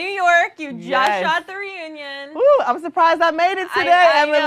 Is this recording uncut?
yes; 0 cuts

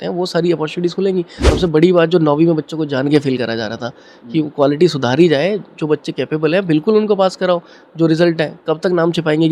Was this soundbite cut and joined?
yes; 1 cut; at 1.4 s

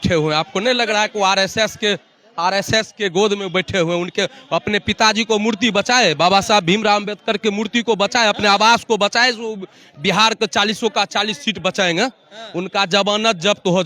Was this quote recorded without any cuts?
yes; 0 cuts

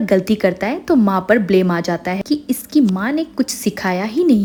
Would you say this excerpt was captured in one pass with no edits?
yes; 0 cuts

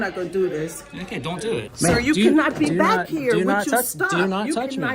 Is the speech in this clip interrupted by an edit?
yes; 1 cut; at 1.7 s

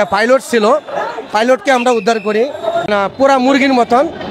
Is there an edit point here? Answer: yes; 1 cut; at 2.9 s

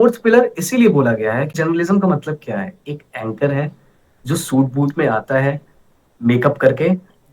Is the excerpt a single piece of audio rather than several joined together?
no; 1 cut; at 1.5 s

